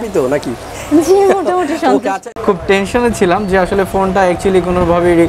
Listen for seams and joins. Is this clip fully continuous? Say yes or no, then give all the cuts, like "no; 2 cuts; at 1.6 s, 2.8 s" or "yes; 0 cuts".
no; 1 cut; at 2.3 s